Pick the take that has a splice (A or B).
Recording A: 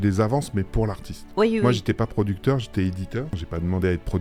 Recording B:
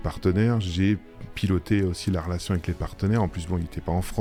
A